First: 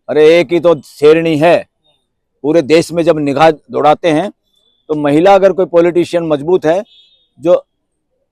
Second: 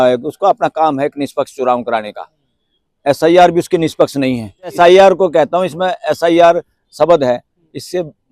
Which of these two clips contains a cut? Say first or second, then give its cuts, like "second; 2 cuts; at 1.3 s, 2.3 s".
second; 1 cut; at 4.7 s